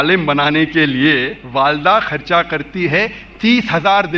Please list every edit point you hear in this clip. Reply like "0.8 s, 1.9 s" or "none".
1.4 s